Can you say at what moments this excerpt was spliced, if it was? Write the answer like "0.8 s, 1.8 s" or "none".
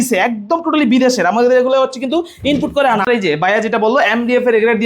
3.0 s